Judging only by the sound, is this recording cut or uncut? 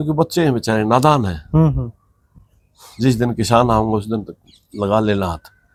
uncut